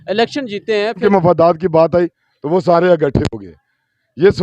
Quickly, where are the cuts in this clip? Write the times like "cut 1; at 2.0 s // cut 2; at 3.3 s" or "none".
cut 1; at 1.0 s